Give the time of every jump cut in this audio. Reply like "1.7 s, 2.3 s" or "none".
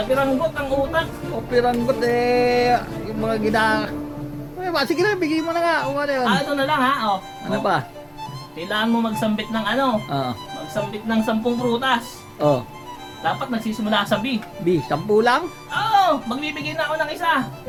none